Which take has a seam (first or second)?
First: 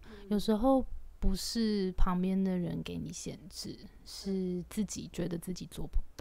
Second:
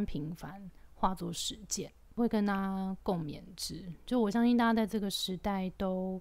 second